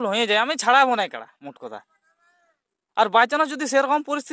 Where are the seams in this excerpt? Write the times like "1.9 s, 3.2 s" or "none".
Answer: none